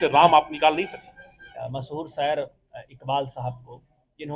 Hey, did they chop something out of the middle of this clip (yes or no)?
yes